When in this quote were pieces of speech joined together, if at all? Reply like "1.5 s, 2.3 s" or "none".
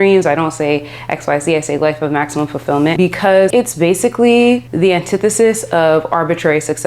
3.5 s, 4.7 s